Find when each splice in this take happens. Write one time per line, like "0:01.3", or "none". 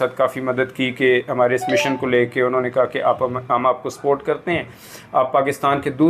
none